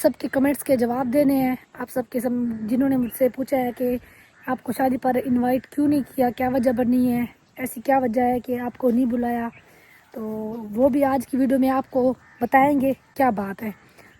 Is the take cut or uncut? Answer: uncut